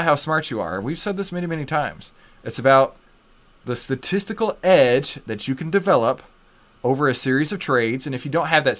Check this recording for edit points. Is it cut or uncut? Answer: uncut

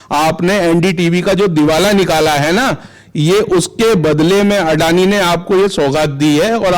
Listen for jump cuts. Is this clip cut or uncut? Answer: uncut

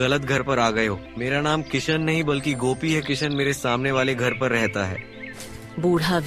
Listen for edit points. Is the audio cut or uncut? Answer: cut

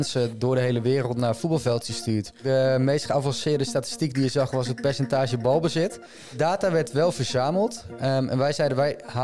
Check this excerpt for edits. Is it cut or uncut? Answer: cut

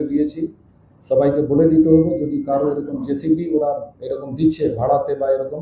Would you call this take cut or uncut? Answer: uncut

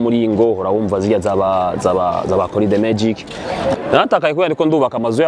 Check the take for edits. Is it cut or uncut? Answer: cut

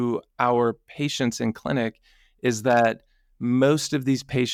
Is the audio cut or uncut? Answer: uncut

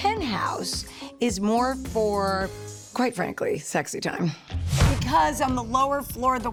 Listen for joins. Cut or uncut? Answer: uncut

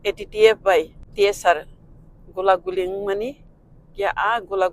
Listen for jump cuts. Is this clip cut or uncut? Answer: cut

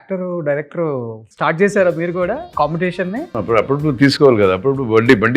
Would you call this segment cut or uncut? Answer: cut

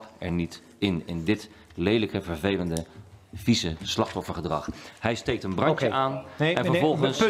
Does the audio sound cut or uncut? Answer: uncut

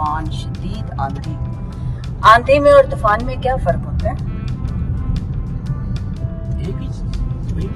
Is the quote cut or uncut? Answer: uncut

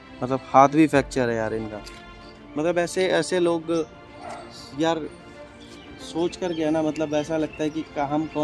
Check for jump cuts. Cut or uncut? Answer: uncut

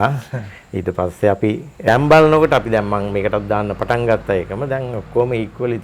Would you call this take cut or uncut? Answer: cut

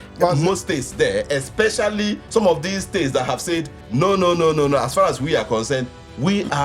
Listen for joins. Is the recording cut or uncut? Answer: cut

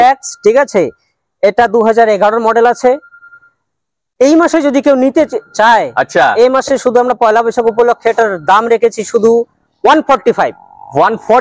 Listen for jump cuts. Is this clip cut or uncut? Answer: uncut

